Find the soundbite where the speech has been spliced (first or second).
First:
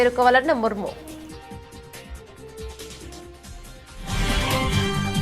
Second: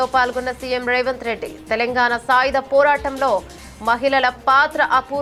first